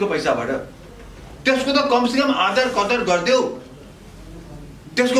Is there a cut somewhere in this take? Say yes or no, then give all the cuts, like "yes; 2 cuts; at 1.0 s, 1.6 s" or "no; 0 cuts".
no; 0 cuts